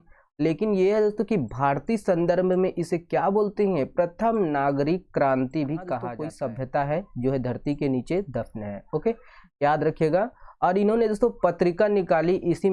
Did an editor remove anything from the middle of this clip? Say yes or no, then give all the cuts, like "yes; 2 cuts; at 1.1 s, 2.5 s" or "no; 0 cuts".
yes; 1 cut; at 6.2 s